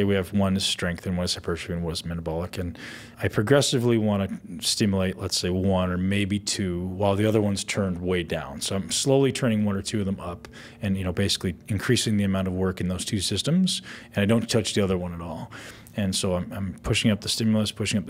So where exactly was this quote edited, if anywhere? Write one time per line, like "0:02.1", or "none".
0:03.1